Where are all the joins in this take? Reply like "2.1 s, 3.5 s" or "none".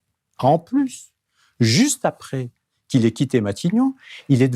none